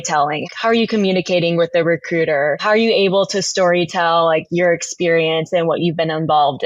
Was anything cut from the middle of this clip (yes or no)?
no